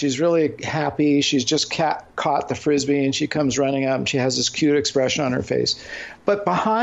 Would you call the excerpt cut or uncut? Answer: uncut